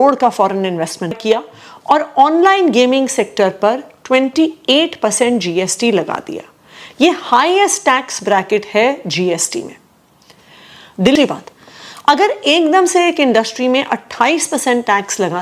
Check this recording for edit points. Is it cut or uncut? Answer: cut